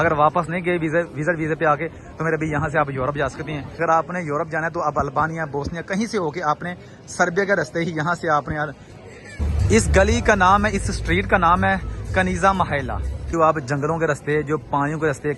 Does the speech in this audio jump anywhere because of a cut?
yes; 3 cuts; at 3.7 s, 9.4 s, 13.3 s

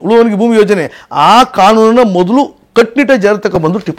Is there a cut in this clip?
no; 0 cuts

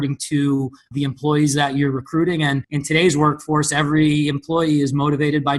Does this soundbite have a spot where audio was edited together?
yes; 1 cut; at 2.7 s

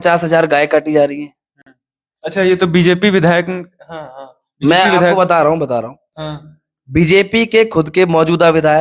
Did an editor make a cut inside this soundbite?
no; 0 cuts

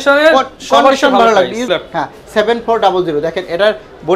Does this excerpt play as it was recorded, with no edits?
no; 1 cut; at 1.7 s

